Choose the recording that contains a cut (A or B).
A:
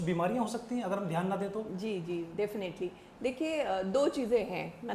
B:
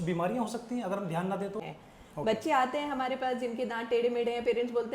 B